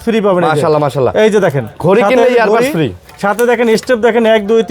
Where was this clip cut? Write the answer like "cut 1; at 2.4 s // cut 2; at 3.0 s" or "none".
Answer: none